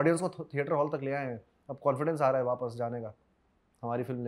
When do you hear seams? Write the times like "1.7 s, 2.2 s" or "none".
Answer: none